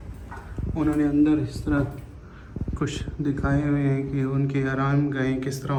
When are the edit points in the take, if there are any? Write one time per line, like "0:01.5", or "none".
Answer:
none